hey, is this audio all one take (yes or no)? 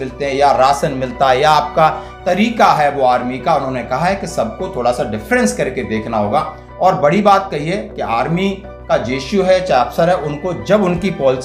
yes